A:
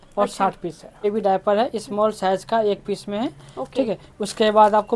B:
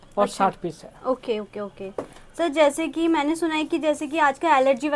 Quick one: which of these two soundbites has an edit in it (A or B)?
A